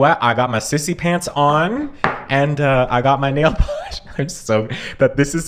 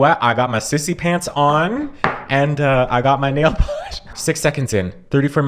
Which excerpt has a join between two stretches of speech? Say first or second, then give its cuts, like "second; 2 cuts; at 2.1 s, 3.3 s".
second; 1 cut; at 4.1 s